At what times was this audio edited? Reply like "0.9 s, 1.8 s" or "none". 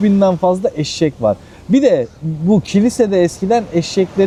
none